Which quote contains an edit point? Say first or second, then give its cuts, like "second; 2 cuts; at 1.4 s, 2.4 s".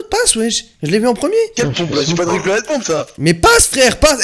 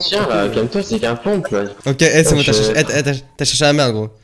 second; 1 cut; at 1.8 s